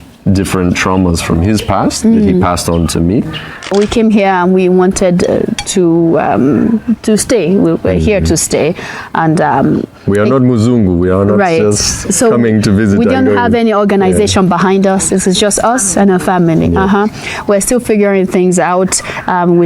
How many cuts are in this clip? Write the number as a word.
one